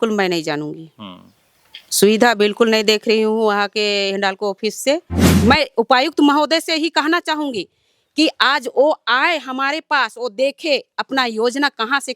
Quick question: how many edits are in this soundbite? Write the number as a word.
one